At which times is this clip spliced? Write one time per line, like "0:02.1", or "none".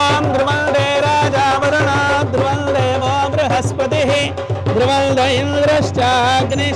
none